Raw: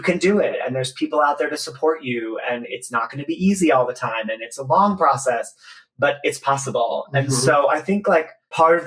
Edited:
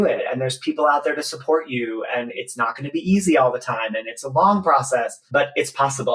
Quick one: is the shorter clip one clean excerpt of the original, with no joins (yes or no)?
no